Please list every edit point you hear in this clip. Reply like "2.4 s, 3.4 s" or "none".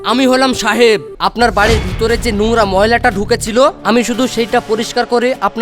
1.1 s